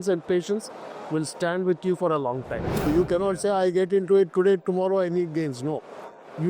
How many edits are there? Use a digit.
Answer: 1